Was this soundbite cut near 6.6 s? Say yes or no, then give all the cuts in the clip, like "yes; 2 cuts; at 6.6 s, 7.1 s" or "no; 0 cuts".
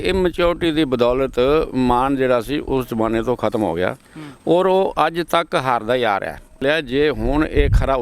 yes; 1 cut; at 6.6 s